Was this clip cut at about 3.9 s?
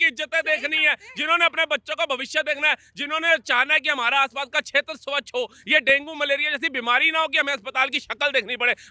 no; 0 cuts

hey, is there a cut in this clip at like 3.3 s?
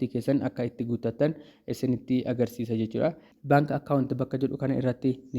yes; 1 cut; at 3.3 s

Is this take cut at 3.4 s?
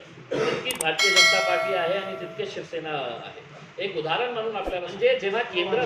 no; 1 cut; at 4.9 s

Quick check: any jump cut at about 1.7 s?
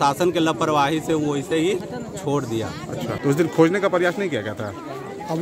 no; 1 cut; at 3.2 s

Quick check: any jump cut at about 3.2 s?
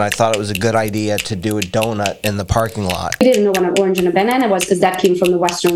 yes; 1 cut; at 3.2 s

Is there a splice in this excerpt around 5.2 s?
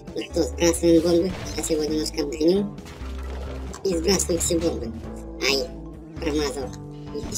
no; 0 cuts

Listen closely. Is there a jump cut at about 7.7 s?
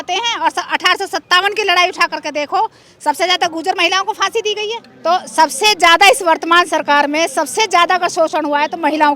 no; 1 cut; at 4.9 s

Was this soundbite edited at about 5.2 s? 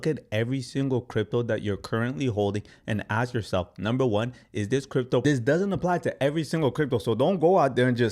yes; 1 cut; at 5.2 s

